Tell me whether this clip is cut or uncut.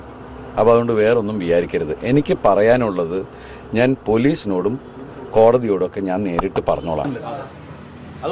cut